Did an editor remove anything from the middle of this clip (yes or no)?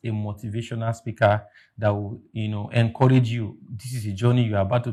no